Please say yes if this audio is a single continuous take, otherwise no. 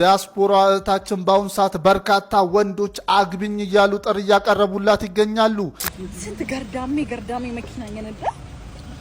no